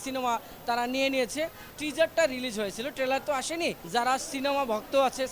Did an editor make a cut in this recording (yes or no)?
yes